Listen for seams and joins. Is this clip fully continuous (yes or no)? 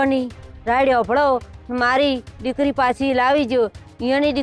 yes